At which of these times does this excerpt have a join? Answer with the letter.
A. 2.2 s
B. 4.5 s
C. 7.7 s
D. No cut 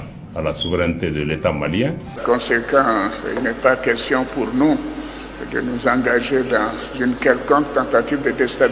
A